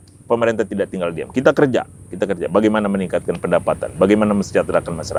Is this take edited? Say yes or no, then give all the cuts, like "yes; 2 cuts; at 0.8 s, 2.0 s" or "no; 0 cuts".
no; 0 cuts